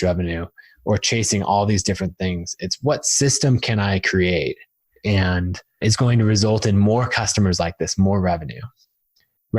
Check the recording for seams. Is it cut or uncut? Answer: cut